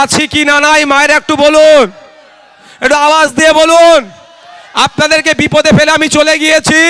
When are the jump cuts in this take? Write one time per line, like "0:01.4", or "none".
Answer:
none